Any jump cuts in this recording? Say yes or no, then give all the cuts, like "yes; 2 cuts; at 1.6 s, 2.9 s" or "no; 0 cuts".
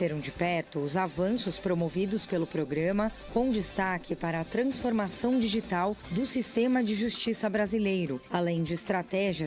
yes; 1 cut; at 8.2 s